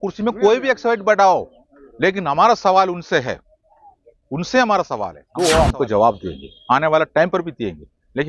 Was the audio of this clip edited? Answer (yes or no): yes